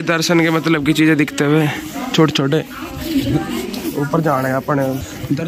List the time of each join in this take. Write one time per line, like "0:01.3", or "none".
none